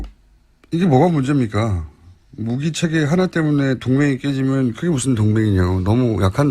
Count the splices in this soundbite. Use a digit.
1